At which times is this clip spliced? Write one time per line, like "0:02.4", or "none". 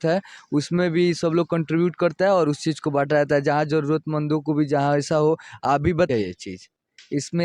0:06.1

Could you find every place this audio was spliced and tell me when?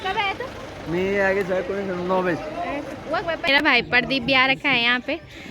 0:03.5

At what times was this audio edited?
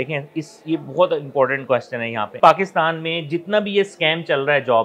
0:02.3

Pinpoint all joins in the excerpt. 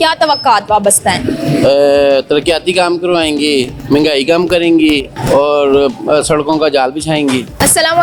none

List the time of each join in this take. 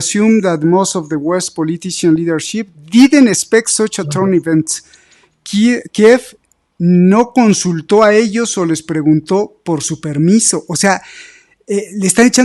none

